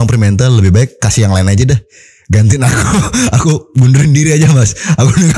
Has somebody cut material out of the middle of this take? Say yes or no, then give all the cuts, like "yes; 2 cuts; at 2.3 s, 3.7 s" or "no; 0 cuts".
no; 0 cuts